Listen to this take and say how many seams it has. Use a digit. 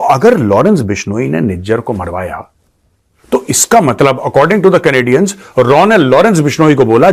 0